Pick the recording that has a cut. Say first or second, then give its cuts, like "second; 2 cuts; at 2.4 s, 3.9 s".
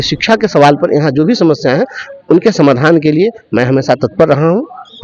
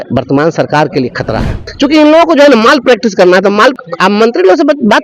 second; 2 cuts; at 1.6 s, 3.8 s